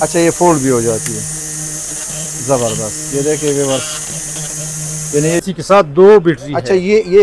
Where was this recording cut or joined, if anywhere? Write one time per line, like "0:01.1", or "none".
0:05.4